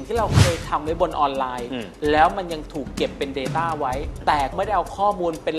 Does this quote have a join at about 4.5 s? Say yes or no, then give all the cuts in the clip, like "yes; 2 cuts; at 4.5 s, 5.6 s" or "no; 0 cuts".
yes; 1 cut; at 4.5 s